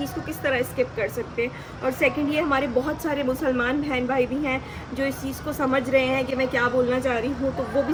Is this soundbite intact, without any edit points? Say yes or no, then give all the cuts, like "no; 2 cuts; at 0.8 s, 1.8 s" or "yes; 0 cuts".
yes; 0 cuts